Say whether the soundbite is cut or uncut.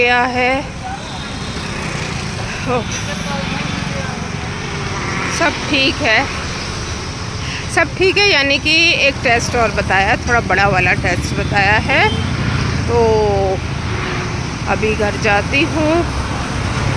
uncut